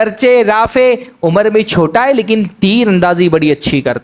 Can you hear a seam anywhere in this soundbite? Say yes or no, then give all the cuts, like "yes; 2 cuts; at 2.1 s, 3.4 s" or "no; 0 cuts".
no; 0 cuts